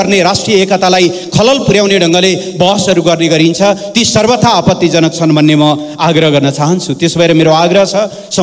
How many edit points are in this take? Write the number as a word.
zero